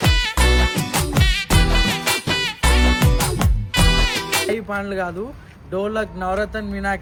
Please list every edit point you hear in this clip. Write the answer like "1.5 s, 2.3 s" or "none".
none